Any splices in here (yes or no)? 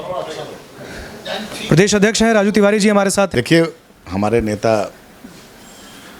yes